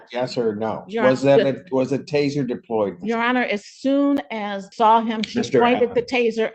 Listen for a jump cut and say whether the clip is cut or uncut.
cut